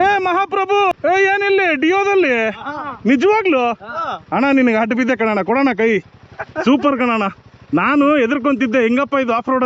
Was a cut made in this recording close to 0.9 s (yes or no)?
yes